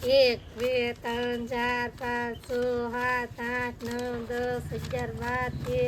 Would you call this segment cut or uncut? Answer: uncut